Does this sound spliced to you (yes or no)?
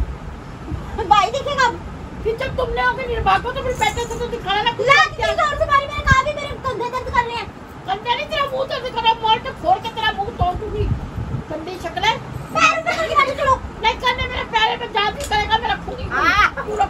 no